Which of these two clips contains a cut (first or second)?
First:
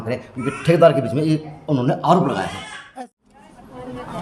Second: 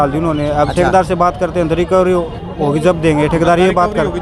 first